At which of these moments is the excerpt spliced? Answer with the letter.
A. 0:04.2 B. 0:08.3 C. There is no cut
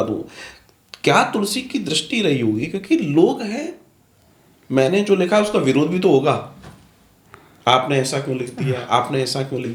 C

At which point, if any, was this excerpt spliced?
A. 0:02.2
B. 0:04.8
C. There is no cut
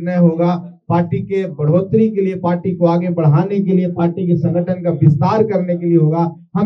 C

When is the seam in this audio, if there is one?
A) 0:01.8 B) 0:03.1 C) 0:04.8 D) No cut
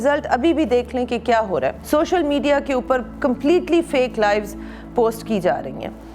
A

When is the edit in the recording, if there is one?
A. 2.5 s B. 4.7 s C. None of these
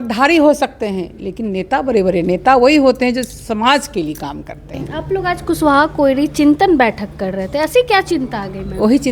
B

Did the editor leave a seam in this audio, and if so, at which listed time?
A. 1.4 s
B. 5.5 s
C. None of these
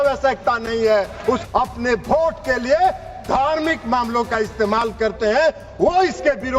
A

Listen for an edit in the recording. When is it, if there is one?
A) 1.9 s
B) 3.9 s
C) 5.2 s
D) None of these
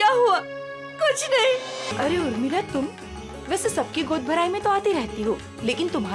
A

